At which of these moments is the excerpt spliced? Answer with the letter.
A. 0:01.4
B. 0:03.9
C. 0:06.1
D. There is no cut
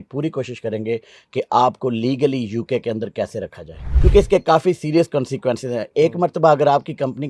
B